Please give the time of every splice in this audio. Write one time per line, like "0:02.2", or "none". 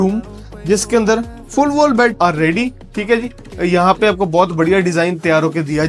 0:02.1